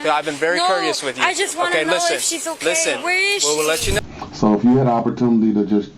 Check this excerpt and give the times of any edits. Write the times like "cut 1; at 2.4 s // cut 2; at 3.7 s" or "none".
cut 1; at 4.0 s

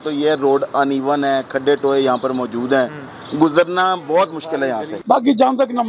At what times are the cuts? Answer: cut 1; at 4.9 s

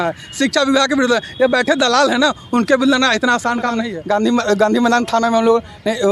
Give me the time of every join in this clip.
cut 1; at 3.9 s

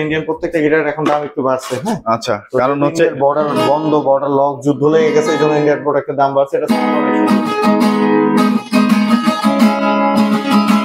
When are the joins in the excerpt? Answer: none

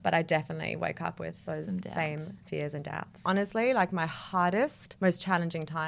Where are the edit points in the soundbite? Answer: cut 1; at 3.1 s // cut 2; at 4.8 s

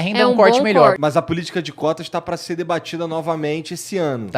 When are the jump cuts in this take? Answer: cut 1; at 1.0 s

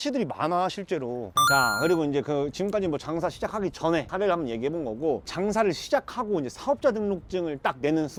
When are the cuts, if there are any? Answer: none

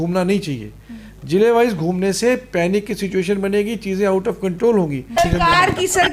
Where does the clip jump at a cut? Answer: cut 1; at 5.1 s

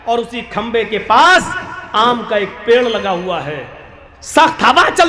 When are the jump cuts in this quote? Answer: none

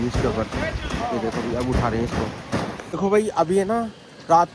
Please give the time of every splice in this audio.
cut 1; at 3.0 s

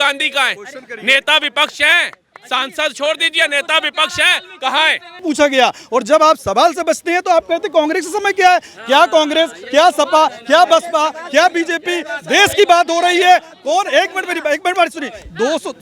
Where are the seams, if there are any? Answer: cut 1; at 5.2 s

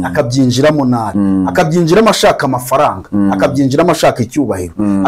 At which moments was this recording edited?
cut 1; at 1.1 s

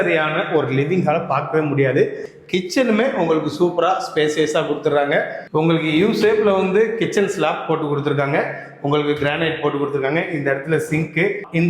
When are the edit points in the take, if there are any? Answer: cut 1; at 2.3 s

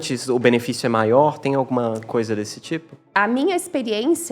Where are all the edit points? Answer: cut 1; at 3.1 s

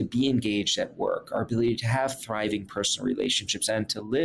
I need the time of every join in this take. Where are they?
none

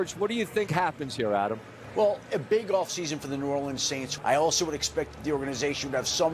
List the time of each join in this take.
cut 1; at 1.8 s // cut 2; at 4.1 s

